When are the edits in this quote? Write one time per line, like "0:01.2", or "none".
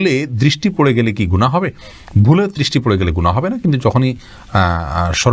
none

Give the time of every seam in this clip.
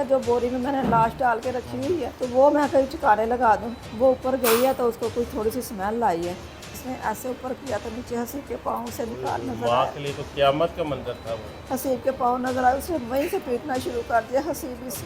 0:03.8
0:06.8

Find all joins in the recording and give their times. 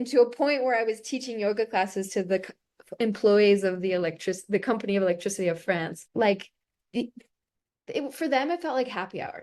0:06.0

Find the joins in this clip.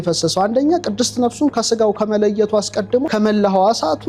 0:03.1

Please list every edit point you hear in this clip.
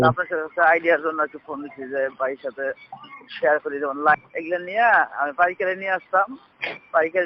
0:04.2

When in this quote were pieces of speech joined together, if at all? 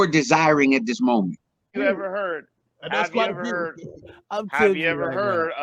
0:01.7

